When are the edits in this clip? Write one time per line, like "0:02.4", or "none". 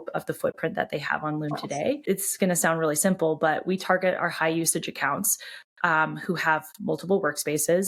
0:02.0